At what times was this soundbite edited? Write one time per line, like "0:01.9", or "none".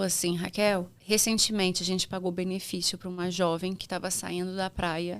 0:00.9